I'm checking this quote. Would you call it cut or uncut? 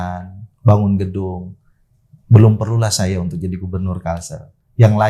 uncut